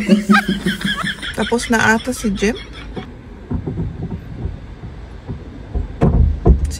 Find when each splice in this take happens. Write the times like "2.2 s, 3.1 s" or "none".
1.3 s